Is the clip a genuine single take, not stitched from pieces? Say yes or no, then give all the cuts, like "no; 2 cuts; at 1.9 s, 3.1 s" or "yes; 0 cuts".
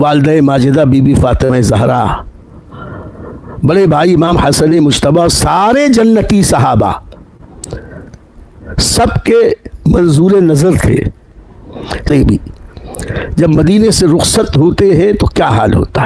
no; 1 cut; at 12.1 s